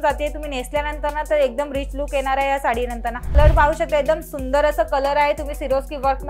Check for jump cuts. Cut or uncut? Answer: cut